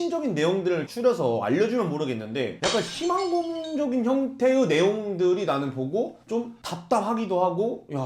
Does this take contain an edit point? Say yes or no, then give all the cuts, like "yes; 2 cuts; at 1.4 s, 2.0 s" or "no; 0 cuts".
no; 0 cuts